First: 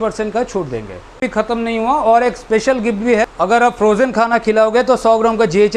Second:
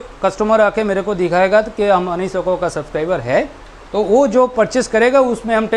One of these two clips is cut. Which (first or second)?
first